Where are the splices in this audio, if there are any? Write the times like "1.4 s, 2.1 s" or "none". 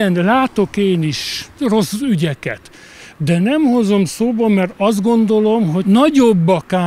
1.5 s, 5.8 s